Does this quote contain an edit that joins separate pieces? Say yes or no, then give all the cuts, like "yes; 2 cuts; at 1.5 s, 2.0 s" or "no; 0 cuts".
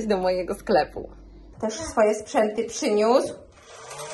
yes; 1 cut; at 1.5 s